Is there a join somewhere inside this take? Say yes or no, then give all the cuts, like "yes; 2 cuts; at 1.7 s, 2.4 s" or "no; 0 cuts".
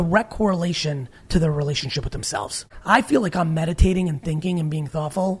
yes; 1 cut; at 2.7 s